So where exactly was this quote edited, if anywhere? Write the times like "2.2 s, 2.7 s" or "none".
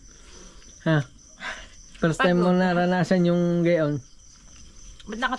none